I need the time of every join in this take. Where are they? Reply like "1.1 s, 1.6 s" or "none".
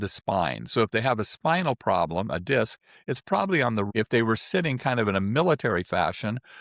3.9 s